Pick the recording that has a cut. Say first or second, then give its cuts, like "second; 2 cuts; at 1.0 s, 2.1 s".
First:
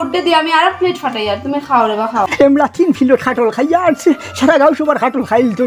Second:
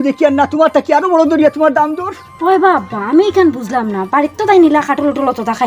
first; 1 cut; at 2.3 s